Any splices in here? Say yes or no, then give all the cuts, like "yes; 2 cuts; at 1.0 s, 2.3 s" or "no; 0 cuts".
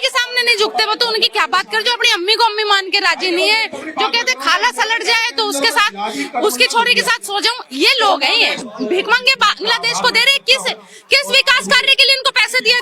yes; 1 cut; at 8.6 s